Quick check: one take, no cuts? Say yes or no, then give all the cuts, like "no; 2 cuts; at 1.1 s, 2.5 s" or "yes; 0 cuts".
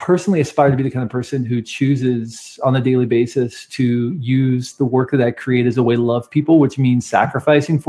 yes; 0 cuts